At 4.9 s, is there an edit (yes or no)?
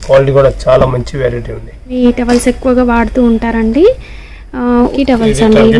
yes